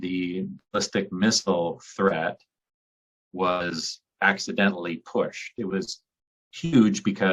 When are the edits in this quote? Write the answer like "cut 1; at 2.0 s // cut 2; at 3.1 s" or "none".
cut 1; at 5.6 s